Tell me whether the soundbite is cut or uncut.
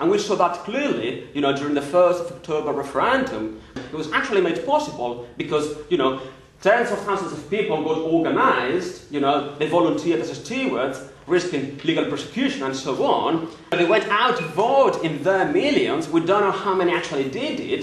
cut